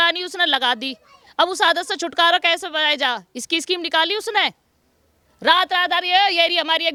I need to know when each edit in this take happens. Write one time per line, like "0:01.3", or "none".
none